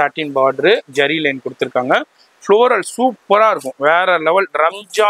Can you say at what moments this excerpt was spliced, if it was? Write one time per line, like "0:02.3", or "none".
none